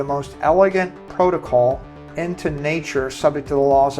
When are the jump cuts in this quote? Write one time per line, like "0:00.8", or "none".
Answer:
0:01.9

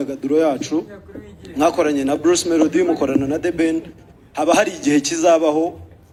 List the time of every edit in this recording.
none

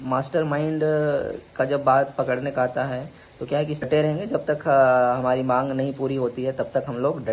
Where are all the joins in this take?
0:03.9

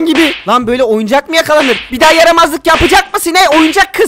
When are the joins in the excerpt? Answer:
0:01.8

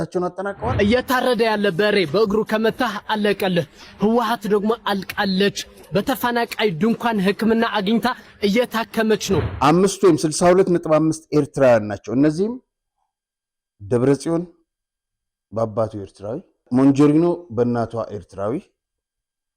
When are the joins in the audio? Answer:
0:00.7
0:09.5
0:16.6

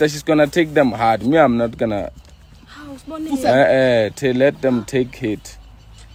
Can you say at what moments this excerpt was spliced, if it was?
none

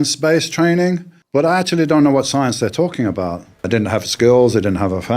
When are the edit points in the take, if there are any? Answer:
0:01.1
0:03.7

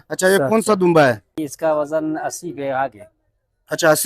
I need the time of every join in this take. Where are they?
0:01.4

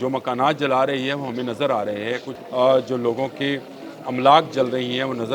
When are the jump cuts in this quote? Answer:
0:02.3

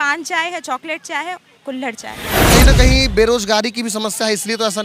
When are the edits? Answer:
0:02.4

